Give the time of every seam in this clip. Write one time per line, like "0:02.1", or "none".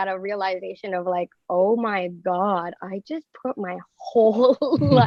none